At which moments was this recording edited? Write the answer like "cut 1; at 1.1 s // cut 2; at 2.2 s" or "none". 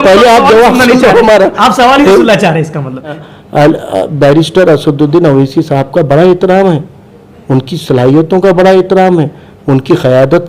cut 1; at 3.2 s